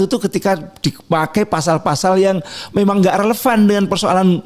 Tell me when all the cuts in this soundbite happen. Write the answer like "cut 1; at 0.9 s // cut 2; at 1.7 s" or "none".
none